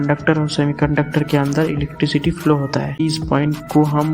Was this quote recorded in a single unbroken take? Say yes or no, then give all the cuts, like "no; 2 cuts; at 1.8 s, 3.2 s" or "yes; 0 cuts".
no; 1 cut; at 3.0 s